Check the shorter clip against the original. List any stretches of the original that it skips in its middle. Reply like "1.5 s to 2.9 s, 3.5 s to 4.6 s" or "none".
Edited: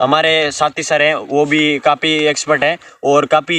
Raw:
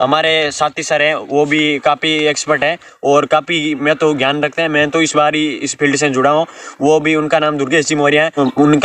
none

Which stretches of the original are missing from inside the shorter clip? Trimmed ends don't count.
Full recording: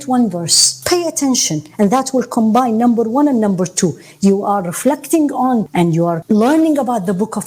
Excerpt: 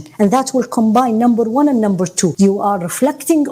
3.9 s to 4.2 s

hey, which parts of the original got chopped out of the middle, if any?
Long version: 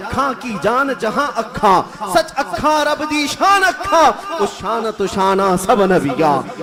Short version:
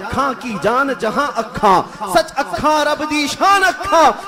none

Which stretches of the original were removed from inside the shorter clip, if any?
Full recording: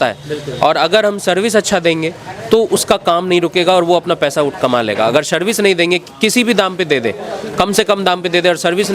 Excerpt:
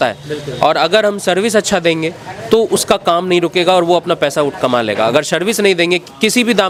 none

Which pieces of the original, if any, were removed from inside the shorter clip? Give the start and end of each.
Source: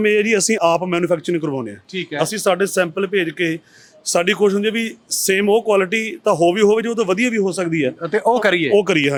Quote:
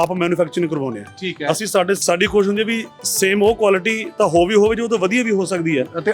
2.7 s to 4.1 s

